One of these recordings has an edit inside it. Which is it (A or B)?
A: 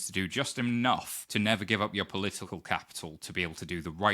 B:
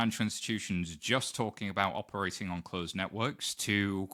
A